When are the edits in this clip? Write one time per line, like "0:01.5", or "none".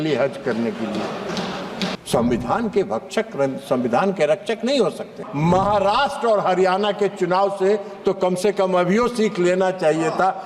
0:02.0
0:05.2